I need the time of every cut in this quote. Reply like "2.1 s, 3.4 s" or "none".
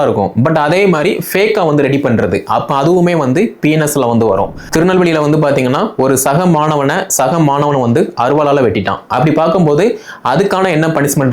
4.6 s